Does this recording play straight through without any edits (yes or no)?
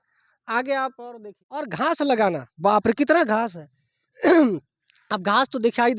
no